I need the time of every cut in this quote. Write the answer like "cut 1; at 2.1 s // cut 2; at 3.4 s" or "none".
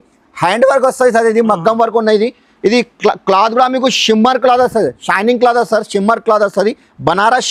none